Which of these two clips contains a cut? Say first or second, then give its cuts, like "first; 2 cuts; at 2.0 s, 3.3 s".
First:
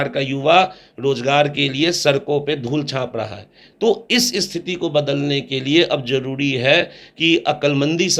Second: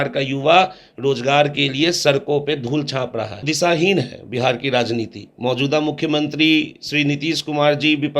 second; 1 cut; at 3.5 s